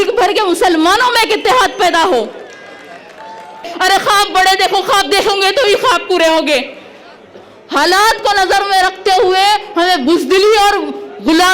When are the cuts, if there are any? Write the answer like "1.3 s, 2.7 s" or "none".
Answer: 3.7 s